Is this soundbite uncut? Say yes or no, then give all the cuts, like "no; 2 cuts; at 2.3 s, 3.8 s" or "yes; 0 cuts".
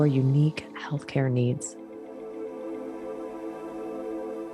no; 1 cut; at 1.7 s